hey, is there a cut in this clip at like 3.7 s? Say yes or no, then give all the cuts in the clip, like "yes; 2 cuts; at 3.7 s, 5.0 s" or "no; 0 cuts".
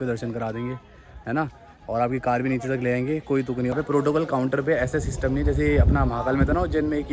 yes; 1 cut; at 3.7 s